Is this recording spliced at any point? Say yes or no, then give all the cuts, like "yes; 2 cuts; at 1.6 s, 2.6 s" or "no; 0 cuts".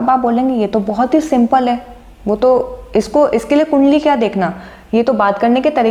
no; 0 cuts